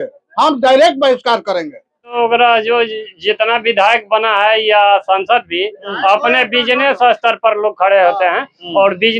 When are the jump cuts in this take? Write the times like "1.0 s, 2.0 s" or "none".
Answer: 2.1 s